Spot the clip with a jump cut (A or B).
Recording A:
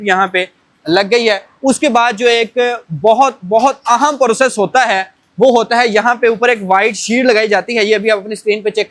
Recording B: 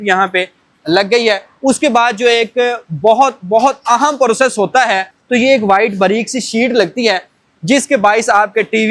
B